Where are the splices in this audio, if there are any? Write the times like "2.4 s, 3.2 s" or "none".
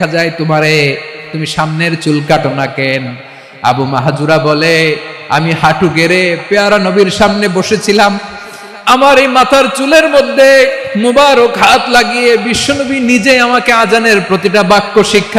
14.2 s

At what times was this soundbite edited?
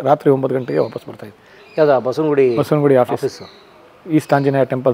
none

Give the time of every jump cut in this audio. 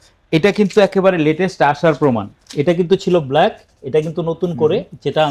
none

